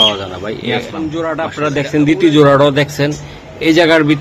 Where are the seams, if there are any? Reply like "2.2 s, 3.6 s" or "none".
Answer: 1.1 s